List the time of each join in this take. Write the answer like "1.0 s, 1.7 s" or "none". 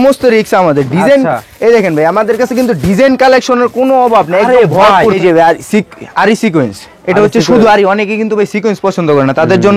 5.2 s